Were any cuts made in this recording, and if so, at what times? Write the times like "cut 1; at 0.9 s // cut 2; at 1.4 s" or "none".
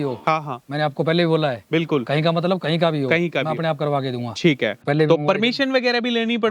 cut 1; at 4.8 s